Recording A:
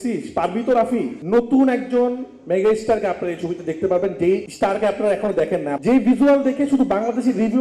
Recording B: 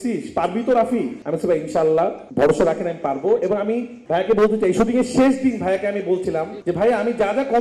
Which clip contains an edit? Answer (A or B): A